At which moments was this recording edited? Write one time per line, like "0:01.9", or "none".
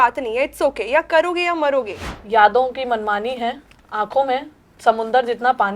0:02.0